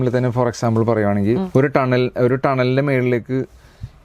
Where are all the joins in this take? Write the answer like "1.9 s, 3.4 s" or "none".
none